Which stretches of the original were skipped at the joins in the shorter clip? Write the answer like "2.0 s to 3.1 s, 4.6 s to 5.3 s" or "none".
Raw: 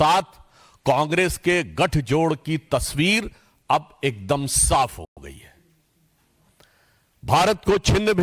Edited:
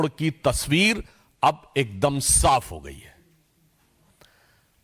5.1 s to 5.2 s